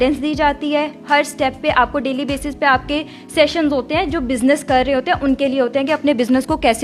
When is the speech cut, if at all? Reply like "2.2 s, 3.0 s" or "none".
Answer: none